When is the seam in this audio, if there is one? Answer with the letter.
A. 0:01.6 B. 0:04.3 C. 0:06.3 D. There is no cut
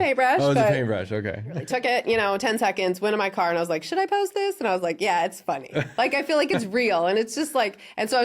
A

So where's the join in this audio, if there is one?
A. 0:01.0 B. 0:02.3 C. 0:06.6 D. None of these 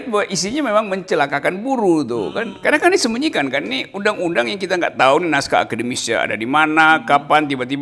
B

